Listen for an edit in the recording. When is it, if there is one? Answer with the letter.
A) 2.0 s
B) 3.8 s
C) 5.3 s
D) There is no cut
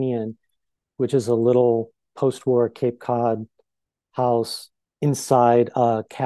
A